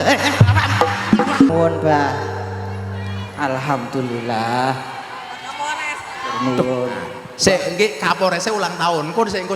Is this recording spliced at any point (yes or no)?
yes